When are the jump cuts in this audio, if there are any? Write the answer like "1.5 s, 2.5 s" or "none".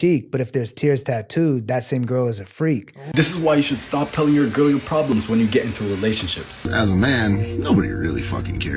3.0 s, 6.7 s

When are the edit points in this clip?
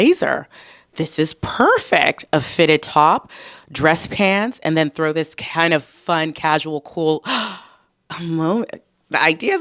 none

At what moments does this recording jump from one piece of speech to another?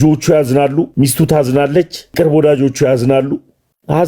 0.9 s, 2.1 s

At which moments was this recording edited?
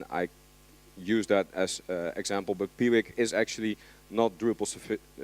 3.2 s

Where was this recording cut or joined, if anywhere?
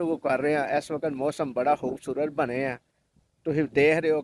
none

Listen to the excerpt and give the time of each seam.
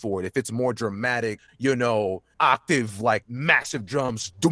1.5 s, 2.3 s, 3.3 s

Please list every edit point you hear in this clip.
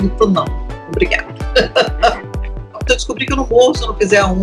2.8 s

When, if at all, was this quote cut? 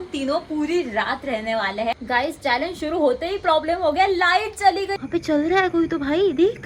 2.0 s, 4.9 s

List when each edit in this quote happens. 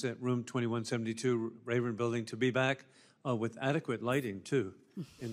1.8 s

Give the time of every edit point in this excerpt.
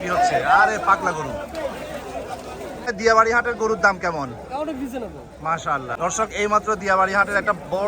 2.9 s, 6.0 s

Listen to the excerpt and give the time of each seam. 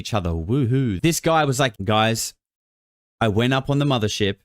1.0 s, 1.8 s

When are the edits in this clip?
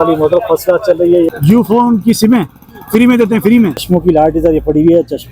1.3 s, 3.8 s

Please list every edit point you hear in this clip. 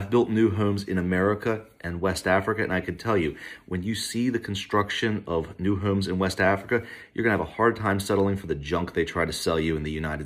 none

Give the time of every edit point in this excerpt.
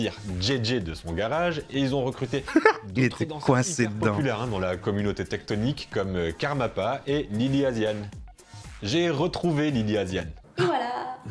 none

